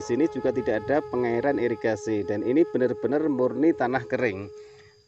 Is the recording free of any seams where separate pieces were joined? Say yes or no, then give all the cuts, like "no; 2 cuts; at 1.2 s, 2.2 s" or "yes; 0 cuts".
yes; 0 cuts